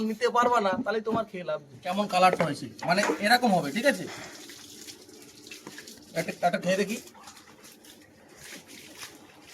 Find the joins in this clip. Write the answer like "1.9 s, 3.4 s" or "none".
1.7 s